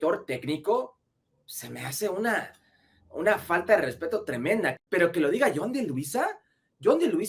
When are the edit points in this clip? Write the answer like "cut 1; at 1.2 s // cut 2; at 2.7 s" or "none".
cut 1; at 4.8 s